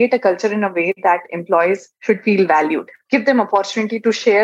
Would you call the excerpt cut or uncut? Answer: cut